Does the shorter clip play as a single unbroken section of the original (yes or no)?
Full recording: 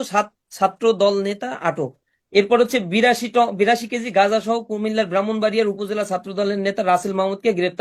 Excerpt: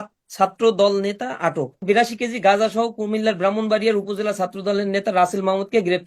no